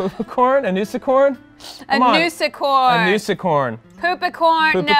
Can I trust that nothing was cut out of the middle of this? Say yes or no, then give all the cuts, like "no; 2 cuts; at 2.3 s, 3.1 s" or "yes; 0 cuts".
yes; 0 cuts